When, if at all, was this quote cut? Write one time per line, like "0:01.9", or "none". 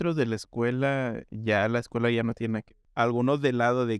0:02.8